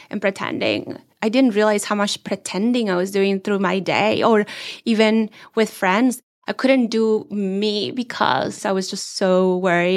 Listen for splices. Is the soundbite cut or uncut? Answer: cut